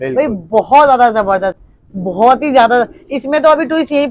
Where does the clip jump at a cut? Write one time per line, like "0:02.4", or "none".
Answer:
none